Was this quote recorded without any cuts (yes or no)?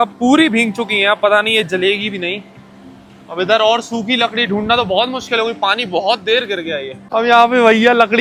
yes